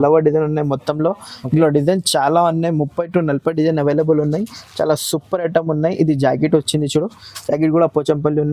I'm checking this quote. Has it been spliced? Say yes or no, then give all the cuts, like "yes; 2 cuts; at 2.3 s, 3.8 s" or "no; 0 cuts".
no; 0 cuts